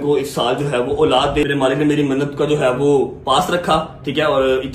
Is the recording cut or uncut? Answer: cut